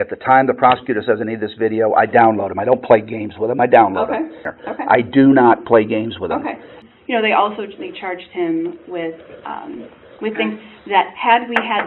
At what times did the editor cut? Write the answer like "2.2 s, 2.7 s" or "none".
4.4 s, 6.7 s